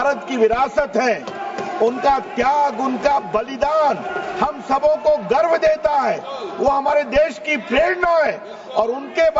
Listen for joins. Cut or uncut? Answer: uncut